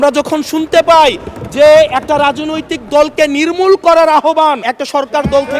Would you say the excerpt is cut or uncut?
cut